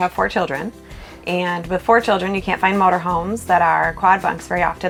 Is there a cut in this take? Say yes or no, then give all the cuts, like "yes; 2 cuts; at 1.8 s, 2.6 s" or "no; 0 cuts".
no; 0 cuts